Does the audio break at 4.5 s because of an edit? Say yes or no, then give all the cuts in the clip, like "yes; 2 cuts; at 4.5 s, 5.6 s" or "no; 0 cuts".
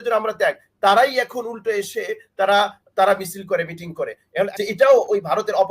yes; 1 cut; at 4.5 s